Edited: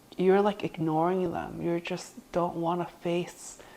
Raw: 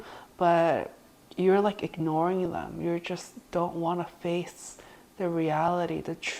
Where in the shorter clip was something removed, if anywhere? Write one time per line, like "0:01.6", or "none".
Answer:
none

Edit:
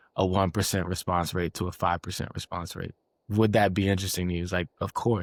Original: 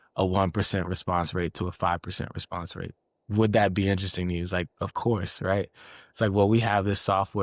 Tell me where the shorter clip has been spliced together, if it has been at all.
none

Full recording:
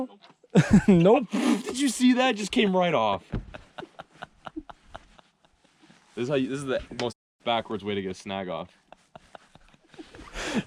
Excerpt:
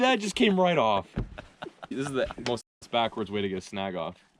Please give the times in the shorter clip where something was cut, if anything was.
0:01.9

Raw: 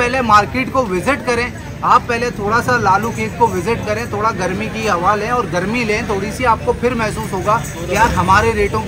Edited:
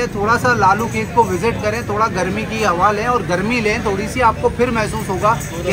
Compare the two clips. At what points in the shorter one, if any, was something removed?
none

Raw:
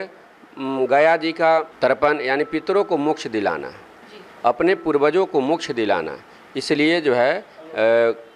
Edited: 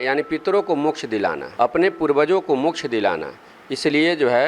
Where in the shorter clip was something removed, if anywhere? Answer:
0:01.4

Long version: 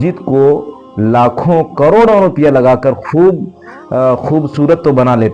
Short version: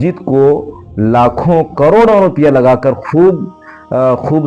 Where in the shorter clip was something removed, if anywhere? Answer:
none

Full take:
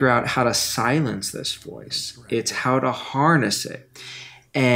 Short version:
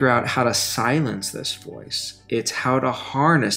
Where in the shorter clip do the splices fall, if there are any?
none

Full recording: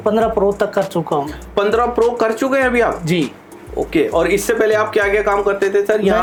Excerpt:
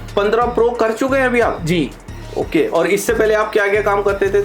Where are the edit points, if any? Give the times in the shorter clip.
none

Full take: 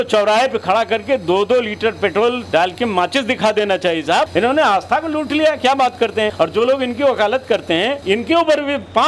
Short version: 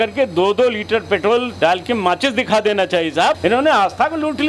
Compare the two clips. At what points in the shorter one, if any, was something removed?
none

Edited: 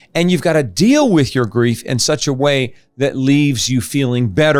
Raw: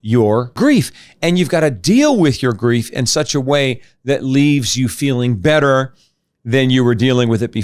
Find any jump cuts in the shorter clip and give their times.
none

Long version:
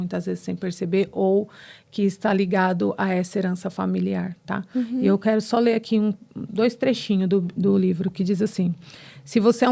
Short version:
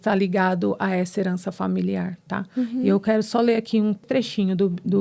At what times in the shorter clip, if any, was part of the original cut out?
0:04.1

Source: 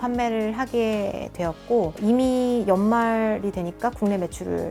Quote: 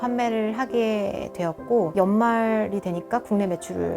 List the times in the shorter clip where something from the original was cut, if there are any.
0:01.9

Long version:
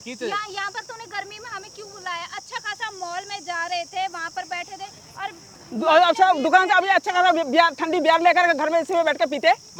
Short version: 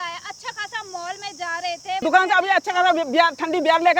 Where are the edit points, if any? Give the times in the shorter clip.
0:02.0

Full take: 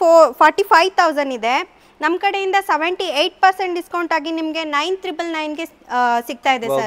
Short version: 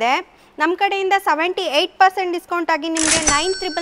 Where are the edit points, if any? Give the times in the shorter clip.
none

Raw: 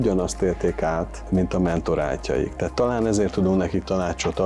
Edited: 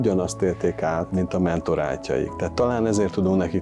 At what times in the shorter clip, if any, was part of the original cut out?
0:01.1

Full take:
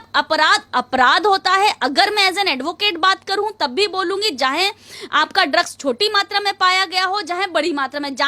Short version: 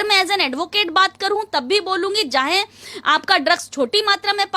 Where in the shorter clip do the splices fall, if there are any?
none

